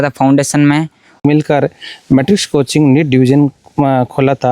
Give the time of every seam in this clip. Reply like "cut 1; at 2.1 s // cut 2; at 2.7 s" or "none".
cut 1; at 1.2 s